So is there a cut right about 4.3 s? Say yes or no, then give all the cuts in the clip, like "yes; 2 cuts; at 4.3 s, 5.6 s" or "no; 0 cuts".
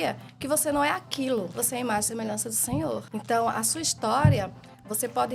no; 2 cuts; at 1.5 s, 3.1 s